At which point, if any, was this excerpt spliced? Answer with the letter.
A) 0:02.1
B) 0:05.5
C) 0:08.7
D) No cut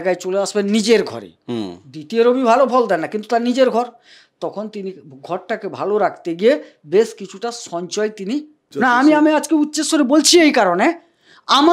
C